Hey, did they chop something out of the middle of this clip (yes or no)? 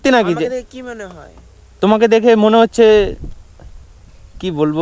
yes